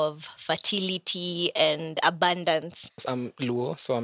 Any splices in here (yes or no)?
yes